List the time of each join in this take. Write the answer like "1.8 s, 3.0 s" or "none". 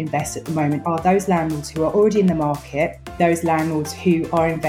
0.8 s, 3.2 s